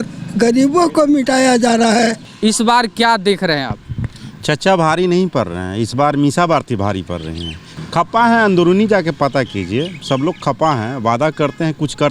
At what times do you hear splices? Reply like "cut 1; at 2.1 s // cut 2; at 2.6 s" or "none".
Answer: cut 1; at 2.3 s // cut 2; at 7.7 s